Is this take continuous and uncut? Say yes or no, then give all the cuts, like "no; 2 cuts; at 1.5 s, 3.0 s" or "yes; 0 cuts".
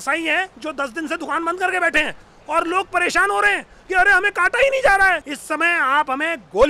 no; 1 cut; at 5.3 s